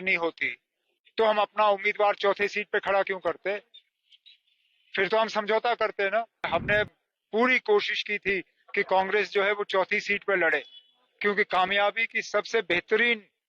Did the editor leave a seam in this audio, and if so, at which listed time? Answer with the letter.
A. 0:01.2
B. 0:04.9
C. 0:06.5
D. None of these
C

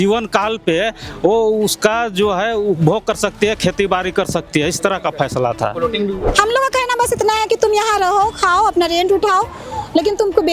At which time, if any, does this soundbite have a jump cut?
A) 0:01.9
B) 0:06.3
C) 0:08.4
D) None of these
B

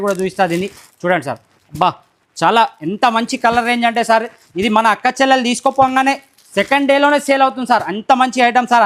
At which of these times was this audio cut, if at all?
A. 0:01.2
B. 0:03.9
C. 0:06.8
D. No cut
D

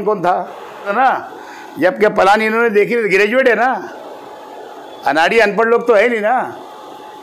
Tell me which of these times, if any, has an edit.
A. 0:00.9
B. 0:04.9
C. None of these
A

